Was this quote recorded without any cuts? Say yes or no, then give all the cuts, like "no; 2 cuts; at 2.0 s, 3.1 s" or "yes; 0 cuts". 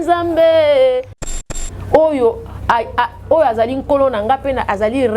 no; 1 cut; at 1.5 s